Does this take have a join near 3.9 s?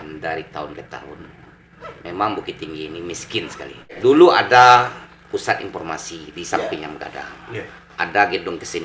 yes; 1 cut; at 3.9 s

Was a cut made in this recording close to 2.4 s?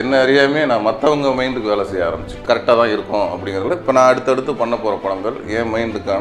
yes; 1 cut; at 2.4 s

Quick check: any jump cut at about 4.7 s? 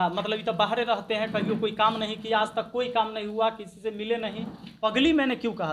yes; 1 cut; at 4.7 s

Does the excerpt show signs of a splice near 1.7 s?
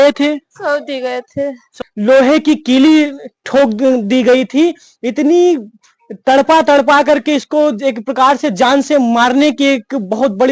yes; 1 cut; at 1.7 s

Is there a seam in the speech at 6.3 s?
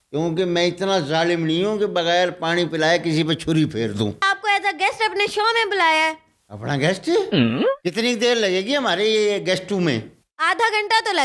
no; 1 cut; at 4.2 s

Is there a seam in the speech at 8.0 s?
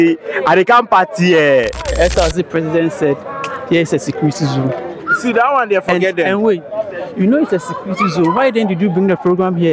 no; 1 cut; at 1.8 s

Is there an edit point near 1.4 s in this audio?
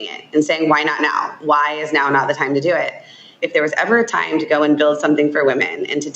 no; 1 cut; at 3.4 s

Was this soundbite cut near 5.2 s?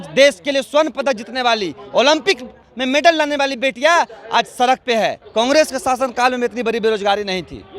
yes; 1 cut; at 5.2 s

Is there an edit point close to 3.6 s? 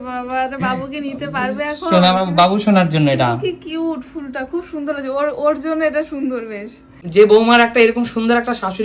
no; 1 cut; at 7.0 s

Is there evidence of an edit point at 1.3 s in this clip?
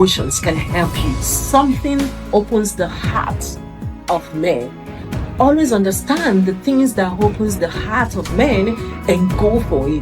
yes; 1 cut; at 1.3 s

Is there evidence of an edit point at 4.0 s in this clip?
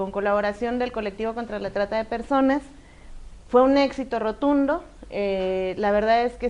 no; 0 cuts

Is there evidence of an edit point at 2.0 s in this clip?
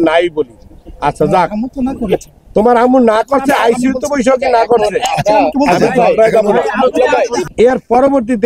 no; 1 cut; at 7.4 s

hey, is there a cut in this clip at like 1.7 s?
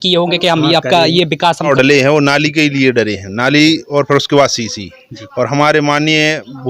yes; 1 cut; at 1.7 s

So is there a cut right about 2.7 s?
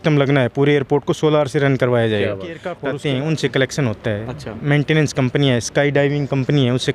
yes; 1 cut; at 2.7 s

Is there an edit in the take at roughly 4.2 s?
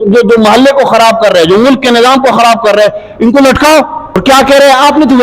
yes; 1 cut; at 4.2 s

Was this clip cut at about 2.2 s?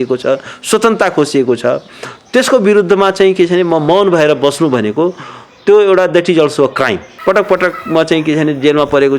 no; 1 cut; at 7.1 s

